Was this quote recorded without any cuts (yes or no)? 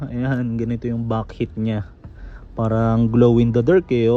yes